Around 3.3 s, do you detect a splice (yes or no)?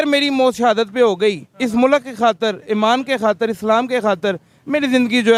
no